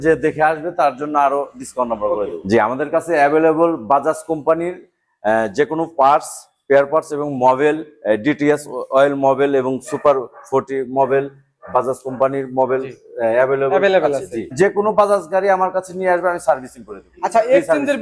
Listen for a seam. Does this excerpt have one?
yes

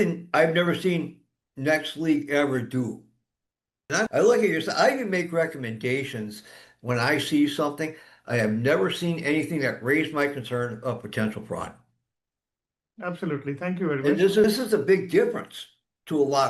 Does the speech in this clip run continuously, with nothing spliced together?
yes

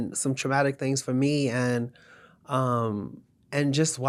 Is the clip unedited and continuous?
yes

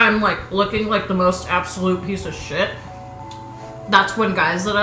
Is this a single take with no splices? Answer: yes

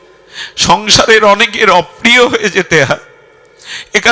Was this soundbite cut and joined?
no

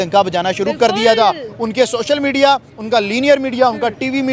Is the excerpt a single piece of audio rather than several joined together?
yes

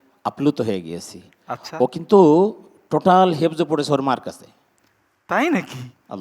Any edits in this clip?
no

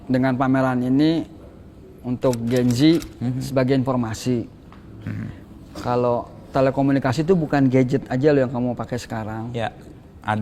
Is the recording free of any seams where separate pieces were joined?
yes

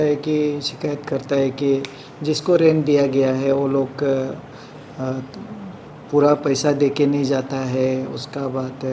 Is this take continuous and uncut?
yes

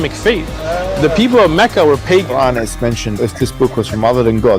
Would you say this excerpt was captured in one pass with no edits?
no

